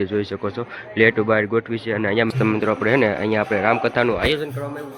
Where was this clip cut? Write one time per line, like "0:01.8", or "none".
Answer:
0:02.3